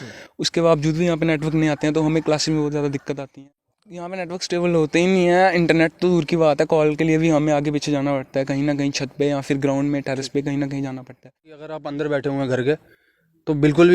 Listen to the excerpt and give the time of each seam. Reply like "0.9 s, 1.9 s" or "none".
3.3 s, 11.7 s